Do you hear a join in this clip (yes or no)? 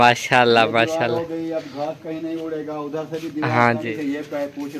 yes